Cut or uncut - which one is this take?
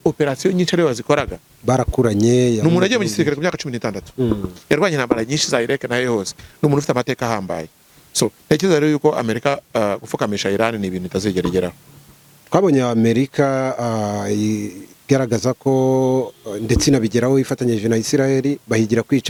uncut